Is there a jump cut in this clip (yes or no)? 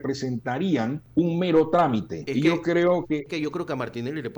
yes